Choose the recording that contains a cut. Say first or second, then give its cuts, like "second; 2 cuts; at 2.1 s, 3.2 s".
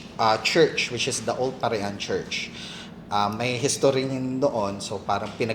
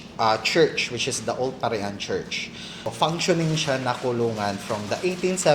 second; 1 cut; at 2.9 s